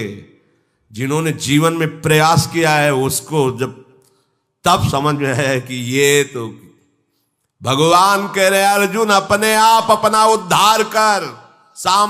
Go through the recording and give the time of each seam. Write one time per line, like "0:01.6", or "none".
none